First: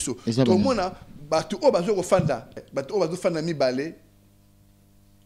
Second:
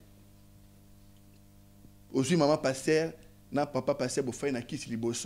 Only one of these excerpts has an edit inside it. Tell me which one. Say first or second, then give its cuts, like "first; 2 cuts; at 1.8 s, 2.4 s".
first; 1 cut; at 2.6 s